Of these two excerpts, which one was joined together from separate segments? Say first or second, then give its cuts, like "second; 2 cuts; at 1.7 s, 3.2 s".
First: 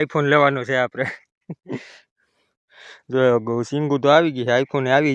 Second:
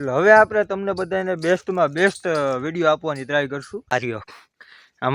second; 1 cut; at 3.9 s